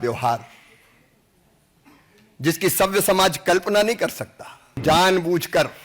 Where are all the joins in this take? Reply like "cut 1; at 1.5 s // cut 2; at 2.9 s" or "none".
cut 1; at 4.8 s